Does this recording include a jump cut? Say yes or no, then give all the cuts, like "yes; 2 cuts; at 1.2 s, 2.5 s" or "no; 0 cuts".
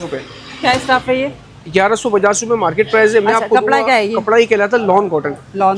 no; 0 cuts